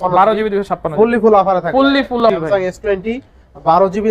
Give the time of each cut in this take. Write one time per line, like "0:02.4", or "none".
0:02.2